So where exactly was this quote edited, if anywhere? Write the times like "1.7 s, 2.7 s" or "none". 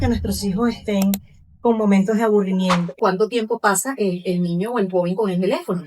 3.0 s